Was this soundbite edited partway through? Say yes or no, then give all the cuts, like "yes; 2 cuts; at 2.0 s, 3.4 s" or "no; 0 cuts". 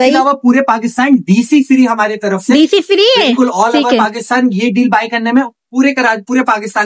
no; 0 cuts